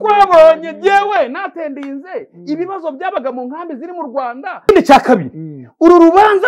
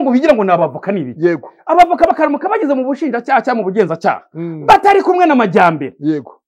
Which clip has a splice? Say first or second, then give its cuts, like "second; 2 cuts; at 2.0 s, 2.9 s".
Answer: first; 1 cut; at 4.7 s